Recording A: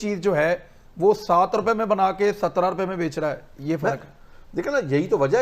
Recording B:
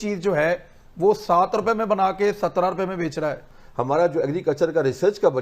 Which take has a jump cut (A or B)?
B